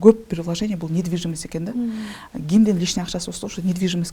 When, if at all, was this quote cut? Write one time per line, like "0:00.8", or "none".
none